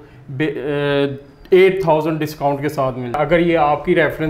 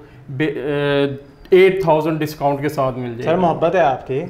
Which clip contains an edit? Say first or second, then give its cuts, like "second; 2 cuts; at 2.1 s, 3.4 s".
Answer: first; 1 cut; at 3.2 s